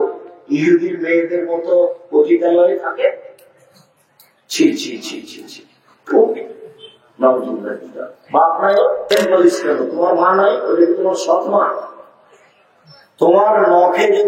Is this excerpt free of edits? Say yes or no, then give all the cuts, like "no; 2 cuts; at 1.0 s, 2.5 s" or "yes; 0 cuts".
no; 1 cut; at 9.1 s